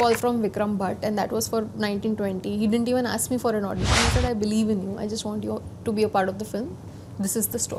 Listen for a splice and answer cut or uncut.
uncut